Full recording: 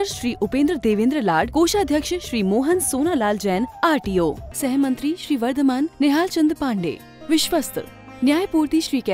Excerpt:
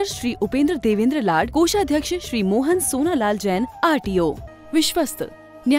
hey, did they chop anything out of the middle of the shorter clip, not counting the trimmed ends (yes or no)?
yes